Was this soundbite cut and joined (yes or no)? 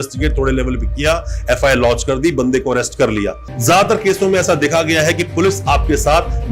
yes